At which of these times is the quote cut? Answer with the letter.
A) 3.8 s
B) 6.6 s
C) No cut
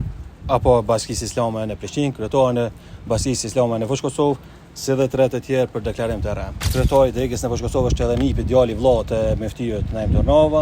B